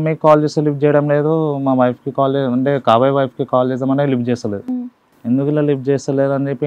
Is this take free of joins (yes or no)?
yes